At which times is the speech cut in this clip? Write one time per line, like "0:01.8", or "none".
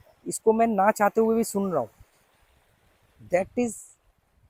none